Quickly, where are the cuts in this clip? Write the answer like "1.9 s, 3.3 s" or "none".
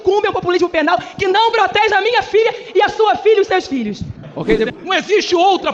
4.7 s